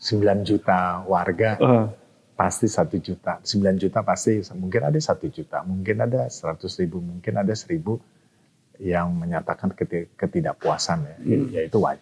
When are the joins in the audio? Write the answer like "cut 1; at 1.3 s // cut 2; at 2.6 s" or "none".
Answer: none